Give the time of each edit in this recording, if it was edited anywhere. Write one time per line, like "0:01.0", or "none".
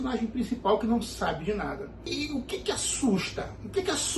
0:02.1